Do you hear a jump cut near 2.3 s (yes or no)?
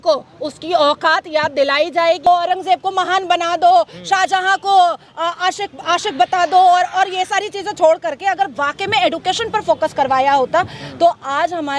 yes